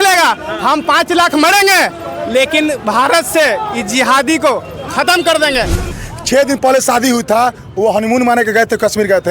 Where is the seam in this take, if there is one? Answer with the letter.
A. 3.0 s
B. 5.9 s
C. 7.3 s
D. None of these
B